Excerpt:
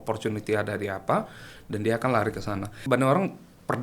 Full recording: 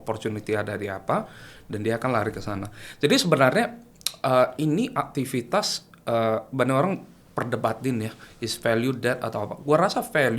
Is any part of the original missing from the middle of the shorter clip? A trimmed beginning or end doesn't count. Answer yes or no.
yes